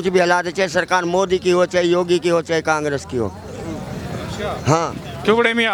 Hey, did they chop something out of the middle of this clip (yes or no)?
no